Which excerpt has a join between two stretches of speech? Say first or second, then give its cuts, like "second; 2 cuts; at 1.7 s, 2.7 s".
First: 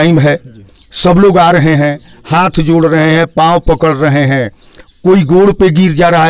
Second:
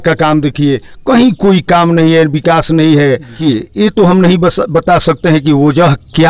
second; 1 cut; at 3.4 s